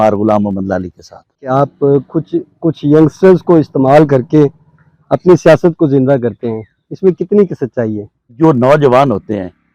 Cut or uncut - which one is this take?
cut